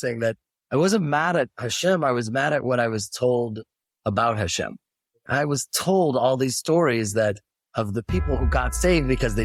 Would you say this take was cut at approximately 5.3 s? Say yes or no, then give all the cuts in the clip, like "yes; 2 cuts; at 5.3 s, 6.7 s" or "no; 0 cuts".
no; 0 cuts